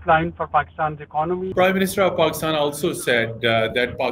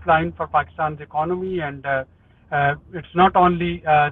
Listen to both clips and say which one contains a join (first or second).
first